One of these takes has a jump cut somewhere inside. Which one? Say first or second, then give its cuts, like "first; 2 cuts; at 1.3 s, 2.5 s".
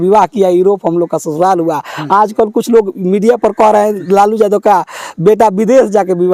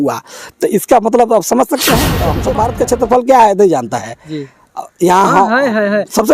second; 1 cut; at 2.4 s